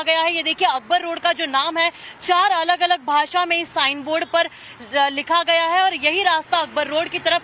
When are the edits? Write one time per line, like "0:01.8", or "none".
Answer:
0:02.1